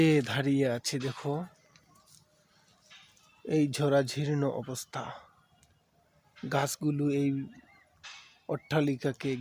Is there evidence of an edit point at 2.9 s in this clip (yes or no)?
no